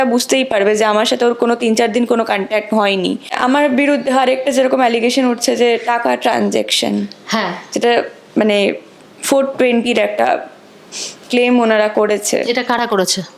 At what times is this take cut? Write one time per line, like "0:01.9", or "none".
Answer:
0:03.3